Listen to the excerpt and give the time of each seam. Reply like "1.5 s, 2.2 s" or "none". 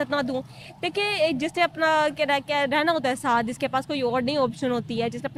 none

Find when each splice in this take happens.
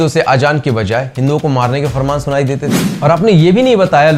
2.8 s

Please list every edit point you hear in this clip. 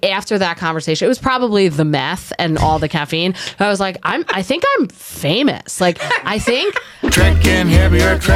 6.9 s

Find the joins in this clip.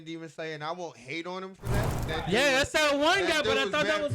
1.9 s

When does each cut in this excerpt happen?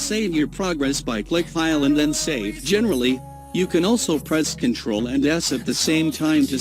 2.6 s

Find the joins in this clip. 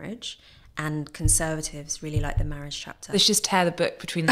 3.1 s

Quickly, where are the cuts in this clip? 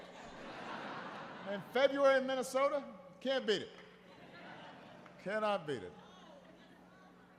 none

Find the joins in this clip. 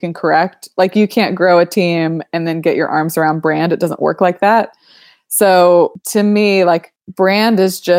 6.0 s, 7.0 s

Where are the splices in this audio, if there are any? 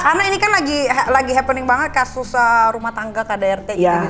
none

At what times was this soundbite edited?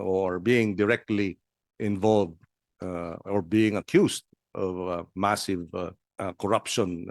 6.0 s

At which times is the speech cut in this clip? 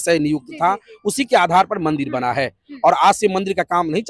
none

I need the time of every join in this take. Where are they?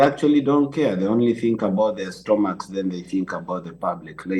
none

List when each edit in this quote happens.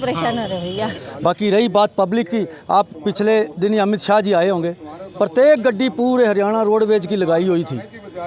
1.0 s

